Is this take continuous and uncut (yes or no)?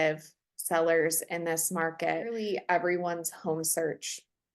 no